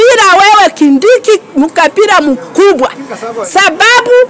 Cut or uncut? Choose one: uncut